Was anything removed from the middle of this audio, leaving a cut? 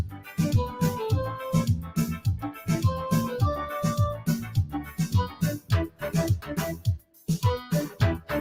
no; 0 cuts

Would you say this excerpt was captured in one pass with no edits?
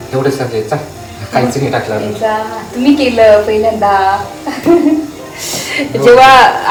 yes; 0 cuts

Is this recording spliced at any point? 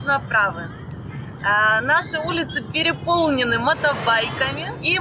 no; 0 cuts

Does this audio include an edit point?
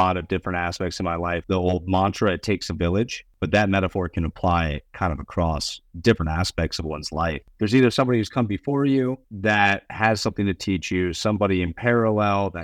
yes; 4 cuts; at 1.4 s, 3.3 s, 7.4 s, 9.3 s

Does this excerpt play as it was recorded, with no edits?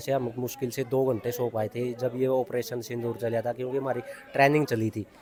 yes; 0 cuts

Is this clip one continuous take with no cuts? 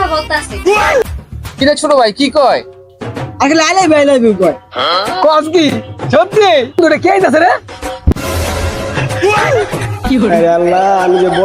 no; 2 cuts; at 1.0 s, 6.8 s

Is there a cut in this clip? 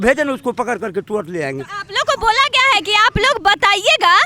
no; 0 cuts

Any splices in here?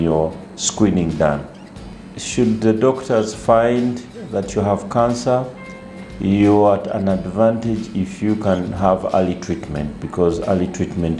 yes; 1 cut; at 1.8 s

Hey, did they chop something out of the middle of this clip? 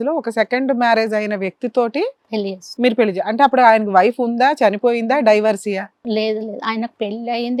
no; 0 cuts

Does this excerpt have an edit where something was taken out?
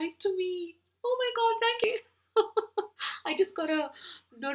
yes; 1 cut; at 1.8 s

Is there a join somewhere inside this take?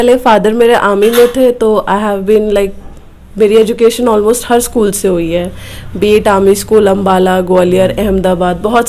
no; 0 cuts

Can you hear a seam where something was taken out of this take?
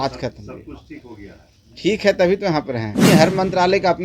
yes; 1 cut; at 3.1 s

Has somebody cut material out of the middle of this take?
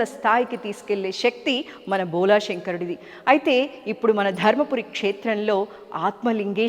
no; 0 cuts

